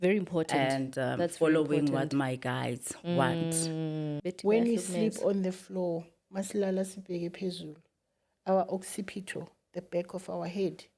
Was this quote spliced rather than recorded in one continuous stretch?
yes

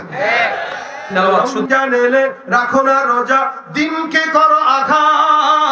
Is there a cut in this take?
yes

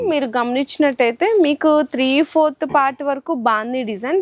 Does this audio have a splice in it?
no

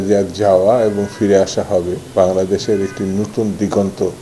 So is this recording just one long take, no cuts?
yes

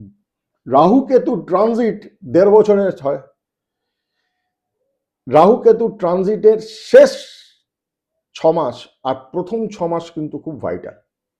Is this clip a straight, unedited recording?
yes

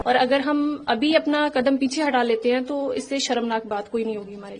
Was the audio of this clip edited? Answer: no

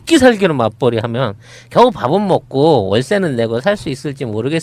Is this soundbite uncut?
no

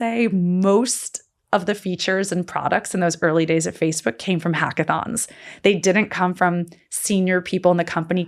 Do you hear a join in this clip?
no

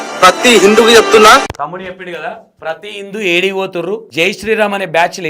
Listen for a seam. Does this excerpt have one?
yes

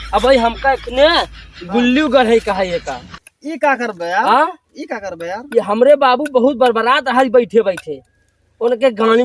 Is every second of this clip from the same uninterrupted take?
yes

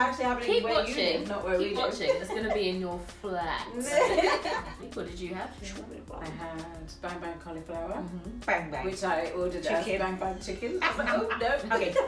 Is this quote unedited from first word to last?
no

